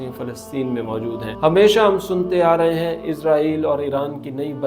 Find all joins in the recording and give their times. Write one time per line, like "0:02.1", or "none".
0:01.3